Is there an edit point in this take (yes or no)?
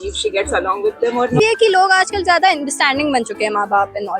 yes